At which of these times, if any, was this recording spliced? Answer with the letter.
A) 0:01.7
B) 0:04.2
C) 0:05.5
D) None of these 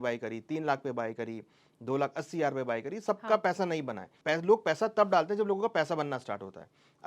B